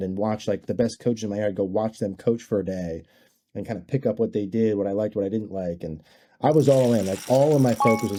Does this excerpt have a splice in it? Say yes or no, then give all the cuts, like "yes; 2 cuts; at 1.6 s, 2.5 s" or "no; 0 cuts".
no; 0 cuts